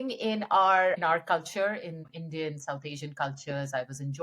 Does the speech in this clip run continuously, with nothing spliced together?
no; 2 cuts; at 1.0 s, 2.1 s

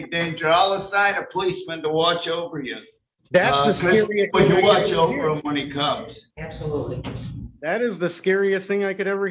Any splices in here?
no; 0 cuts

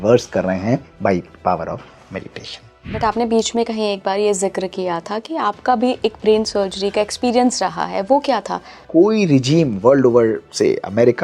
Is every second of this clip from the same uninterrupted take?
no; 2 cuts; at 2.9 s, 8.8 s

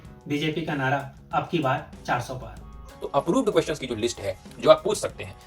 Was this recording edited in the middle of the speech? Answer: yes; 1 cut; at 2.9 s

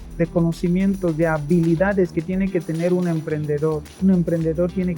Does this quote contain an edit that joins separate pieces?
yes; 1 cut; at 3.9 s

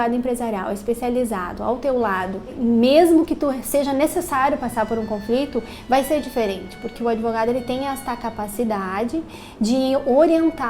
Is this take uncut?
no; 1 cut; at 2.5 s

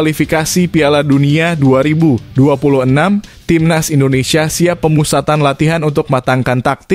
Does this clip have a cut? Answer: no; 0 cuts

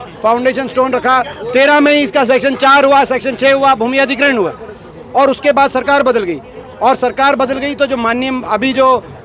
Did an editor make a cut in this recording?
no; 0 cuts

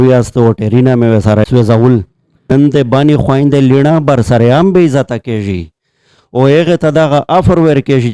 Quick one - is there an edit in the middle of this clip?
yes; 2 cuts; at 1.4 s, 2.5 s

